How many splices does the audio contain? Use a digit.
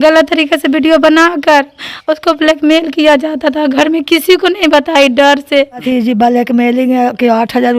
1